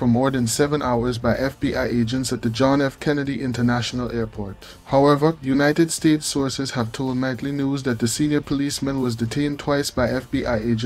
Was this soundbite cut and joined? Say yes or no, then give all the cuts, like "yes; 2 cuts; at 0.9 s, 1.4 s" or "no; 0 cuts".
no; 0 cuts